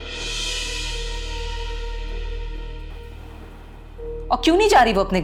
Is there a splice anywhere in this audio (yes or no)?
no